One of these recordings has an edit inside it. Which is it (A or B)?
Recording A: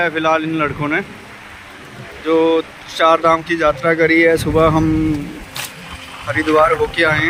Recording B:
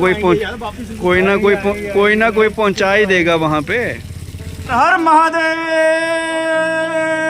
B